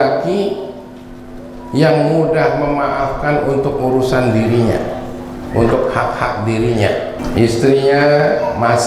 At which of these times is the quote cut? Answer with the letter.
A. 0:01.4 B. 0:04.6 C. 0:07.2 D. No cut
C